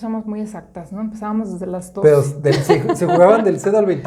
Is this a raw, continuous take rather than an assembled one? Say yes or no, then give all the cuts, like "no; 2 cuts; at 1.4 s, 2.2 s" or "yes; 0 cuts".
yes; 0 cuts